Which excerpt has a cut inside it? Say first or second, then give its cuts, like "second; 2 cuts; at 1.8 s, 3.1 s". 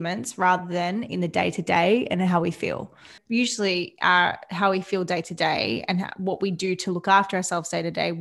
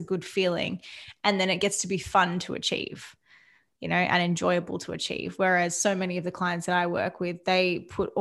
first; 1 cut; at 3.2 s